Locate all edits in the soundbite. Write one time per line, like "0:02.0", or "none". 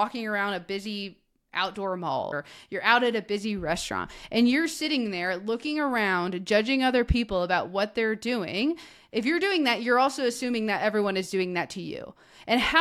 0:02.3